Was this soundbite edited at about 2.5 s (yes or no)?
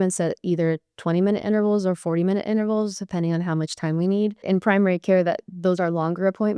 no